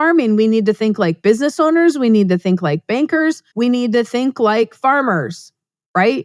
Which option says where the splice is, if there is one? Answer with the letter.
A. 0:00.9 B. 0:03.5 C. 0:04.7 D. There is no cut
B